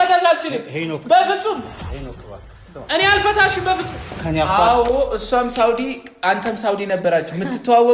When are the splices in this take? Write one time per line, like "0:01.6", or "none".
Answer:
0:04.2